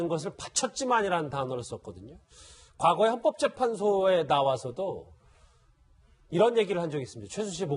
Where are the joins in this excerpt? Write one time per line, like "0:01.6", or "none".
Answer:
none